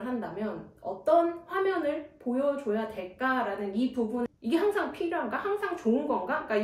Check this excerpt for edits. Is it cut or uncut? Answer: cut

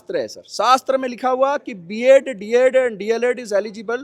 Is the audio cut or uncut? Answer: uncut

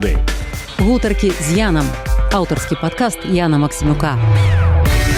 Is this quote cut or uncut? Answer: uncut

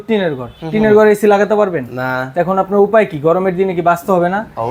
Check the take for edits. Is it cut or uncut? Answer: uncut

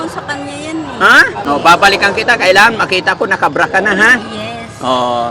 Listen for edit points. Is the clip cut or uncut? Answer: cut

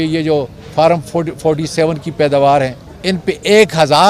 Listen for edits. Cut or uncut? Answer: cut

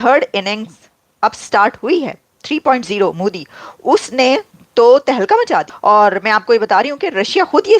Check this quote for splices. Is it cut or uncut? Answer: cut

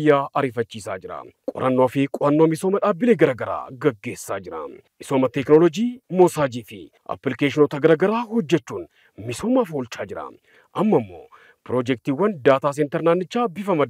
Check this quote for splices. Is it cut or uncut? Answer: uncut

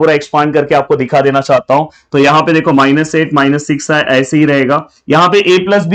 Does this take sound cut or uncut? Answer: uncut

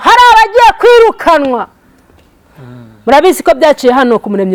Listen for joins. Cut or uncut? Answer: uncut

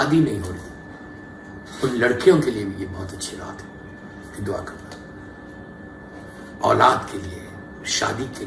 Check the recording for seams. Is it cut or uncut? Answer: uncut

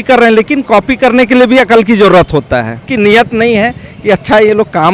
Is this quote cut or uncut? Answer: cut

